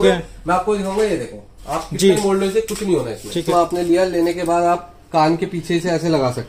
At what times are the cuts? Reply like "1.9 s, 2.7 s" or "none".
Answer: 3.5 s

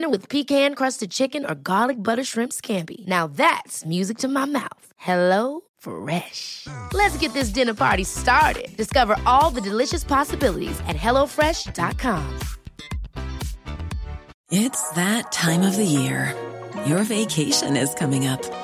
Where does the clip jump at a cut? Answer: 14.3 s

